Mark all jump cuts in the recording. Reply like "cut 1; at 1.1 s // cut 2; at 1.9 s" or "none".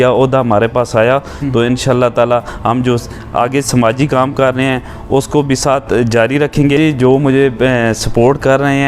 cut 1; at 6.8 s